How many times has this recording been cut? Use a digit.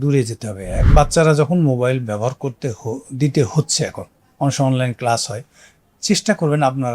1